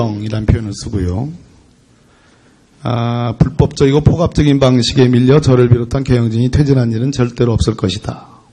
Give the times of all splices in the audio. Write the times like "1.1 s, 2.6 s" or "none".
4.9 s